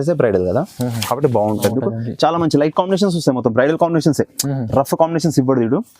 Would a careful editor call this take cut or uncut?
cut